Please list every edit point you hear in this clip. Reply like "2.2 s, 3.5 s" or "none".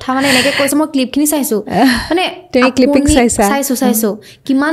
none